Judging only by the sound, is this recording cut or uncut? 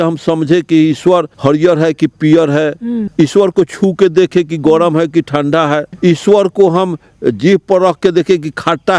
cut